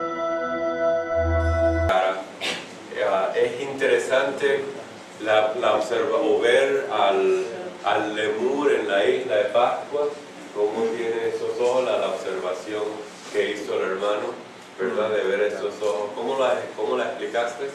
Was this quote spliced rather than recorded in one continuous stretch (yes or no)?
no